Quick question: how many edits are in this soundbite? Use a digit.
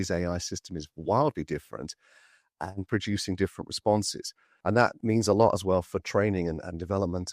1